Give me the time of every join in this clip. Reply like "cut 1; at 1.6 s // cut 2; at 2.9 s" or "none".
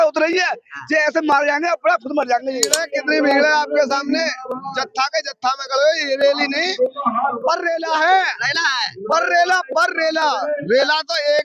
cut 1; at 2.8 s